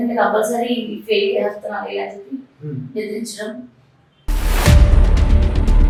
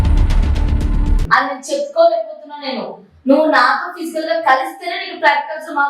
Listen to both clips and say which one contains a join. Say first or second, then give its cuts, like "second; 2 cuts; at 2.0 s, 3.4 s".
second; 1 cut; at 1.3 s